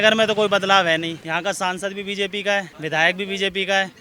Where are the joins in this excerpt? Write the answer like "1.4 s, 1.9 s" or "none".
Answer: 1.2 s, 2.7 s